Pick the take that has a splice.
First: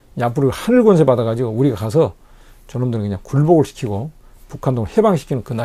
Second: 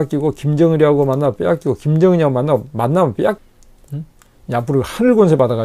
second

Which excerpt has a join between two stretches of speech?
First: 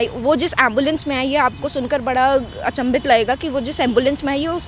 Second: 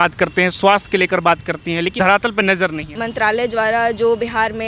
second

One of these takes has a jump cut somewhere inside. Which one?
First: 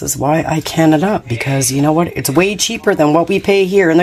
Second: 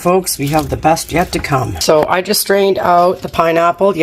second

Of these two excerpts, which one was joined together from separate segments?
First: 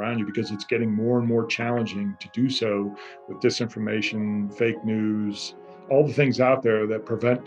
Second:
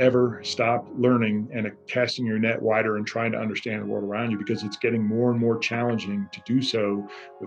first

